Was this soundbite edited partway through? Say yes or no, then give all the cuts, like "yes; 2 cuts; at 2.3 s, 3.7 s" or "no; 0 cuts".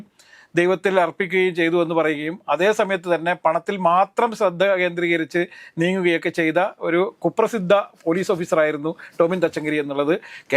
no; 0 cuts